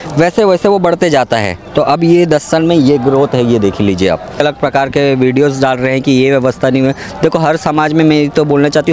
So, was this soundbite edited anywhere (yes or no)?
yes